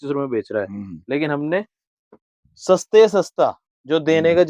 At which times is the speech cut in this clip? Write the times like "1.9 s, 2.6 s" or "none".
none